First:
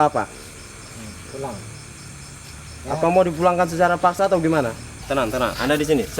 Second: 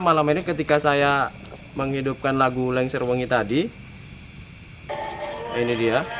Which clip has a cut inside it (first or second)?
first